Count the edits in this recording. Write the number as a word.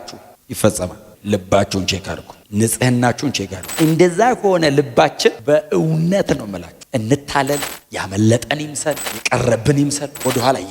one